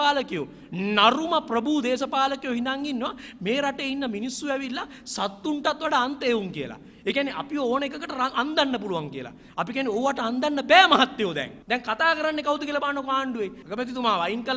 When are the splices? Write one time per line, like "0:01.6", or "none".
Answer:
0:11.5
0:13.6